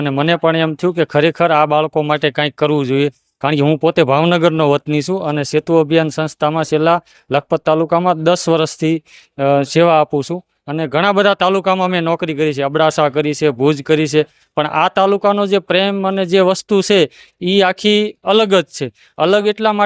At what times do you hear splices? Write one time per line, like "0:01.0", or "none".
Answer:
none